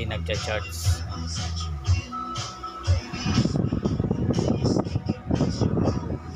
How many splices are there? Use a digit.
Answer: 0